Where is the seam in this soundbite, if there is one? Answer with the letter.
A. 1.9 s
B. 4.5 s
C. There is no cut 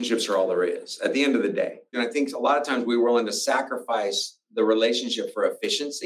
A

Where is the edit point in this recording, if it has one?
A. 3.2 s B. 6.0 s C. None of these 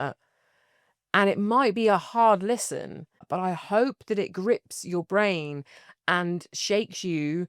A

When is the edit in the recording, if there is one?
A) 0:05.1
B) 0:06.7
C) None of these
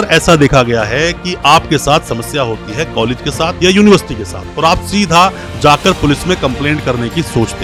C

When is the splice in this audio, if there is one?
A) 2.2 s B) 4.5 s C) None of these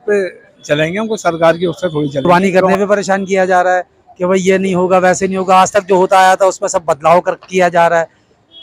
A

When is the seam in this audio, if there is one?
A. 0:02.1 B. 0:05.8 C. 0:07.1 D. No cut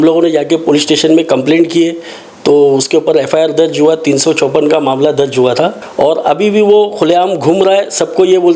B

